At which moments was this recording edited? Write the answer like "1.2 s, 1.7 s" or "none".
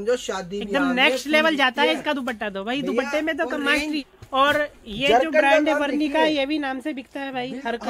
4.1 s